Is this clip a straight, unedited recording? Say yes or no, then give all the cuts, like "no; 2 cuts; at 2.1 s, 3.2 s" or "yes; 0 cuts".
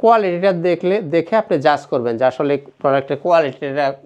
yes; 0 cuts